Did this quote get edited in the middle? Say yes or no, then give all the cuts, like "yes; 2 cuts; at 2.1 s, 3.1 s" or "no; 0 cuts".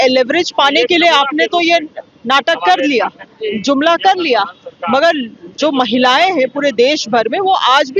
no; 0 cuts